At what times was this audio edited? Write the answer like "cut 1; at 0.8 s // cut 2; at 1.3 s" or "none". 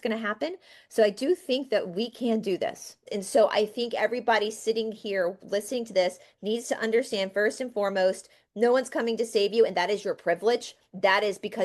cut 1; at 3.0 s